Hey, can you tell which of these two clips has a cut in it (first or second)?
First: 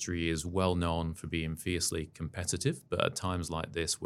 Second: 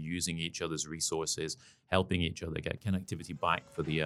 second